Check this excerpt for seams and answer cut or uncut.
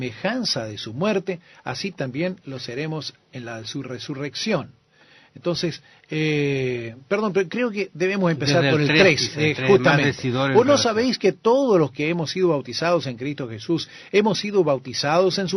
cut